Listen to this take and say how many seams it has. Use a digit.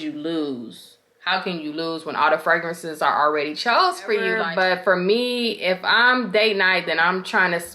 1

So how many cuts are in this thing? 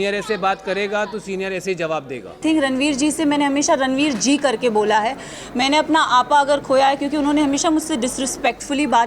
1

